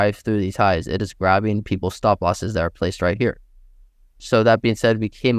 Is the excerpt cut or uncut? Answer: uncut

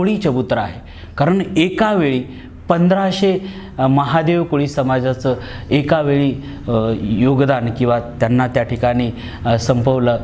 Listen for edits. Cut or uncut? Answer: uncut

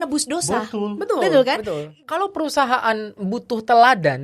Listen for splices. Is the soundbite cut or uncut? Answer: cut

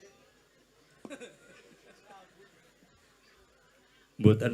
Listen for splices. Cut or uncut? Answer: uncut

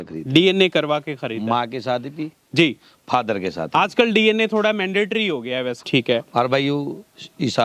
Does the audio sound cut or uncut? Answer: cut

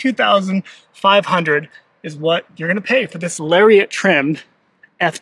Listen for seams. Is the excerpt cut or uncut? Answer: uncut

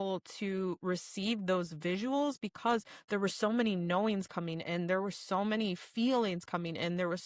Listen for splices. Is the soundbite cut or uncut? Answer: uncut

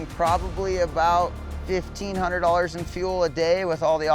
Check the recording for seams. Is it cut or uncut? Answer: cut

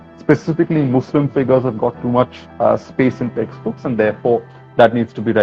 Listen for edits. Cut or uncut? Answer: uncut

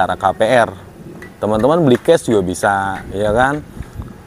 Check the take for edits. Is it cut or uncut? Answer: uncut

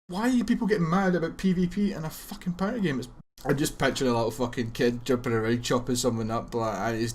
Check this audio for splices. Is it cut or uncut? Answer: cut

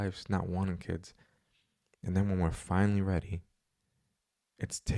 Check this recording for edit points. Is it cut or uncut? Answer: uncut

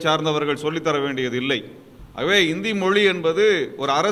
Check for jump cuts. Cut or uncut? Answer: cut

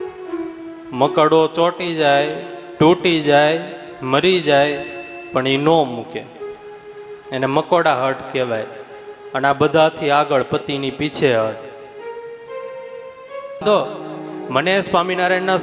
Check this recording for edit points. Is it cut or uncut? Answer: cut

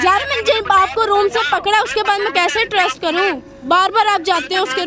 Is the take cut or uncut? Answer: uncut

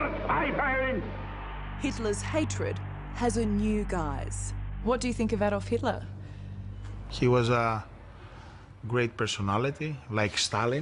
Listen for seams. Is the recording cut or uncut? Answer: uncut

